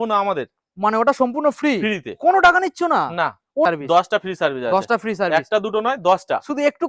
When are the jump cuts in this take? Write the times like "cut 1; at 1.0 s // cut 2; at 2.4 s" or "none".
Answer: cut 1; at 3.7 s